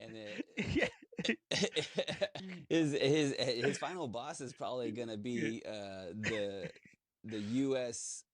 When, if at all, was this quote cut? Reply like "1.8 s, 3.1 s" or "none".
2.4 s